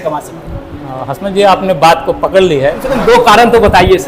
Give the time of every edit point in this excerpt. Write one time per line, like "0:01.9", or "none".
0:02.9

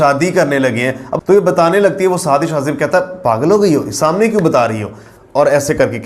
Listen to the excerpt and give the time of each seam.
0:01.1

